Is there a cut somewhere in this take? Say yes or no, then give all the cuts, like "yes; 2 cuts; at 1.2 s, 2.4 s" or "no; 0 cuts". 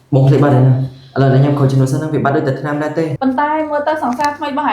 yes; 1 cut; at 3.1 s